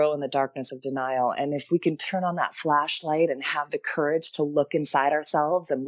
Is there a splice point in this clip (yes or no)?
no